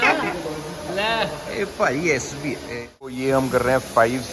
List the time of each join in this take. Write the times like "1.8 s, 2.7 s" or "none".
3.2 s